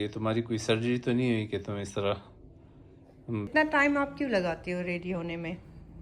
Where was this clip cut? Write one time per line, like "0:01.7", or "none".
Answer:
0:03.5